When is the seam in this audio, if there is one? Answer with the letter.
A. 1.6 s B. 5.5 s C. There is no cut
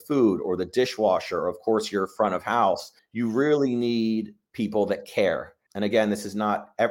B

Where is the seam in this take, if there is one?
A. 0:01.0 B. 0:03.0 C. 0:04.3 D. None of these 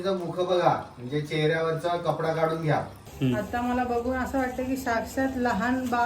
B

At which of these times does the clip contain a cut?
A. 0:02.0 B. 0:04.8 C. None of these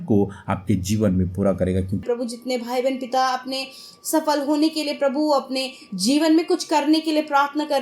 A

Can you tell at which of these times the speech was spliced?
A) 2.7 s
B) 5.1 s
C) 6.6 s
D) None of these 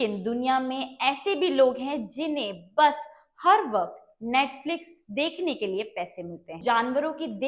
C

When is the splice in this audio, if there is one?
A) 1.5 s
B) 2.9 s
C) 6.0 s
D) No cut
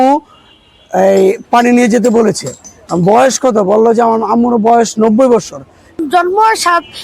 C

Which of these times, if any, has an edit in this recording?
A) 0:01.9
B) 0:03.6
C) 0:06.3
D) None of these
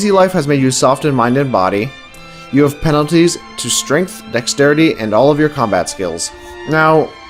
A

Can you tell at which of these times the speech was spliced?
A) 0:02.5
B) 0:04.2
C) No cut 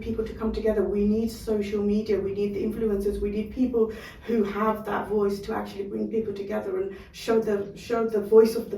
C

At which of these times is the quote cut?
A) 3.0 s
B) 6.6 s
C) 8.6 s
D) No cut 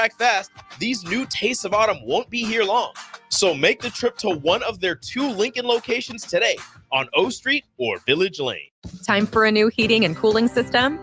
C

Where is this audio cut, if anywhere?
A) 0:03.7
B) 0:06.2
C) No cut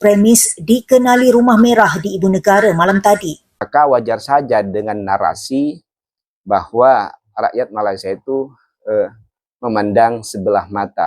A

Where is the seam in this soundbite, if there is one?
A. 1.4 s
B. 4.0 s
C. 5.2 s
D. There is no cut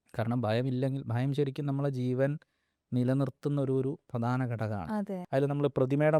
C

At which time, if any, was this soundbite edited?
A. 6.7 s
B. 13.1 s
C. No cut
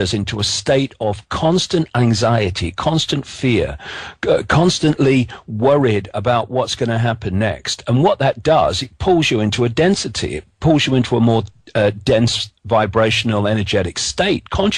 A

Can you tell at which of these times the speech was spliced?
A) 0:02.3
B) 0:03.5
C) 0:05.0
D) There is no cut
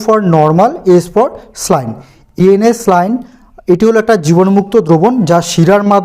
A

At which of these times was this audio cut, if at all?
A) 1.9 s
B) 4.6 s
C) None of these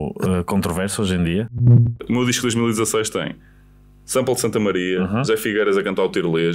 A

